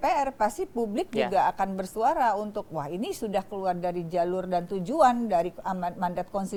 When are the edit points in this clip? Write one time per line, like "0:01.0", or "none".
none